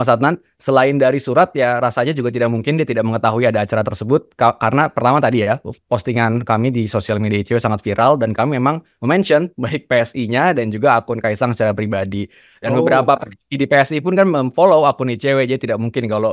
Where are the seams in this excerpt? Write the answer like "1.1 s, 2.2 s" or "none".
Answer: none